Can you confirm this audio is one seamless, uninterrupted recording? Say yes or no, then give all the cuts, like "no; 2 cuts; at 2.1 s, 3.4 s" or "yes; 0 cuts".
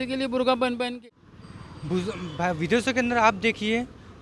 no; 1 cut; at 1.1 s